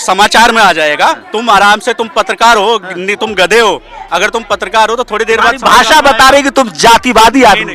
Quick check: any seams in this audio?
yes; 1 cut; at 1.3 s

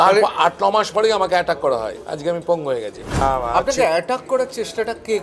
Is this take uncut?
no; 1 cut; at 3.2 s

